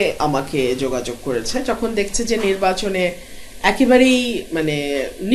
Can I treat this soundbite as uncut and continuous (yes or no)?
yes